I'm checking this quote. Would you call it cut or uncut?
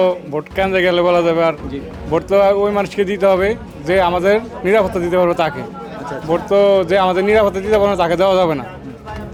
uncut